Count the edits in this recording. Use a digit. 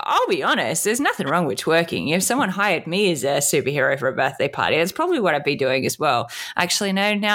0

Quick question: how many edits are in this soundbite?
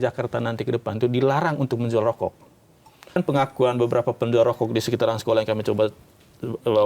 1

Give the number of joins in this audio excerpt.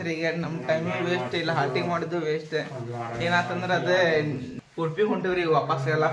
1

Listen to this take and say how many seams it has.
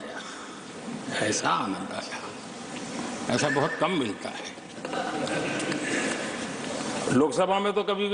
0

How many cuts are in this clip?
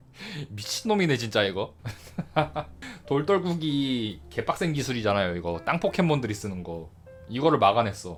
0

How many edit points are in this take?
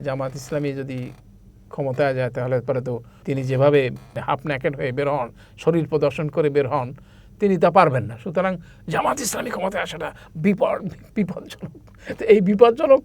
2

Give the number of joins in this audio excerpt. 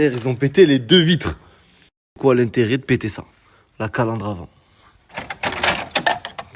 1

